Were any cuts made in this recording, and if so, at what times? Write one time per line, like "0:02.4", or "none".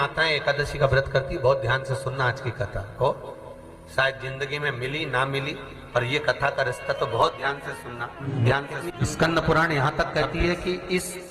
0:08.2
0:08.9